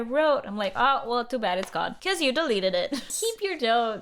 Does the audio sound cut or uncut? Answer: cut